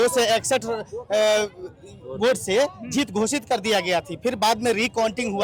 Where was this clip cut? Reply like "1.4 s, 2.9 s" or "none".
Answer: none